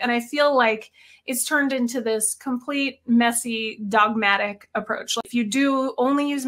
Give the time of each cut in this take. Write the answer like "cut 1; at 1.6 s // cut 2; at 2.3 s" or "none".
cut 1; at 5.1 s

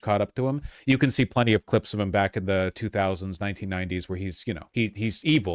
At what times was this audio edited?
cut 1; at 4.6 s

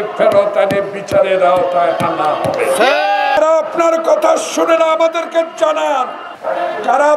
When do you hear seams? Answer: cut 1; at 3.4 s // cut 2; at 6.3 s

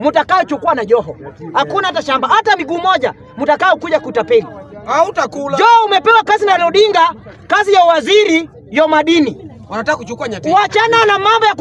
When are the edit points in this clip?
none

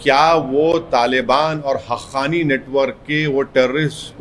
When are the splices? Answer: none

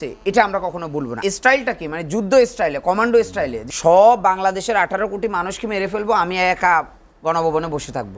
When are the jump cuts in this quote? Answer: cut 1; at 1.1 s // cut 2; at 3.6 s

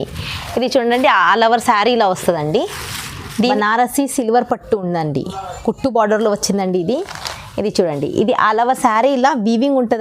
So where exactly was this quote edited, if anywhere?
cut 1; at 3.5 s

